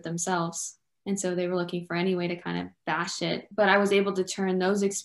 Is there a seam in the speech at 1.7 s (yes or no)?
no